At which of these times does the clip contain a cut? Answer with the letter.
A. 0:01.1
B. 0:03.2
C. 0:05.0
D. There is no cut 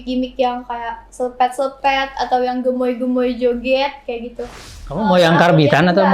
C